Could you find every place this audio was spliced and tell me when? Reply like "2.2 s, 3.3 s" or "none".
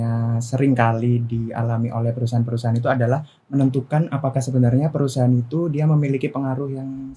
none